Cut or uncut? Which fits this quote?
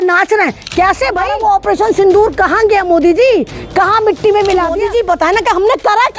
cut